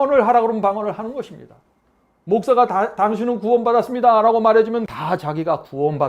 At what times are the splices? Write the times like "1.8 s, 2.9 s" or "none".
4.9 s

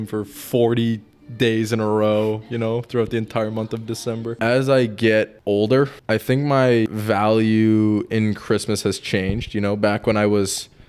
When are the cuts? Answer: 4.3 s, 5.4 s, 6.0 s, 6.9 s

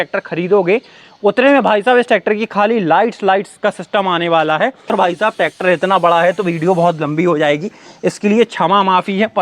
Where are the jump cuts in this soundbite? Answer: 4.9 s

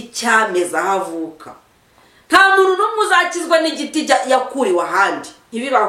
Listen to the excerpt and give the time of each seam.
none

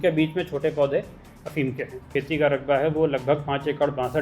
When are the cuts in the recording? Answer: 2.0 s

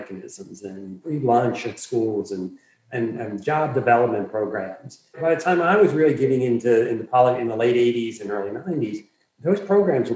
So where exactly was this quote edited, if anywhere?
1.0 s, 5.2 s

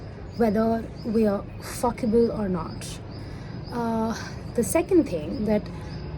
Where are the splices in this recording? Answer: none

